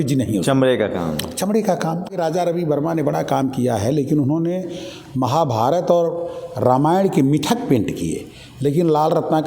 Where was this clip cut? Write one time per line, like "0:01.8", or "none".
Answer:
0:02.1